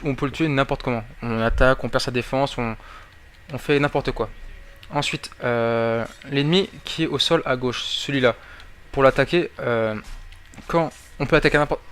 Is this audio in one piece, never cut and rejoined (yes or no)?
no